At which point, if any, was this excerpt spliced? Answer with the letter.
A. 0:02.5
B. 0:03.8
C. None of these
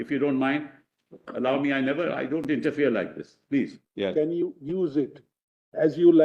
B